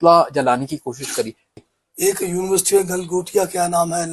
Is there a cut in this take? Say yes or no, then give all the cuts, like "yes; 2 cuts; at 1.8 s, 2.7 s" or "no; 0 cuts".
yes; 1 cut; at 1.6 s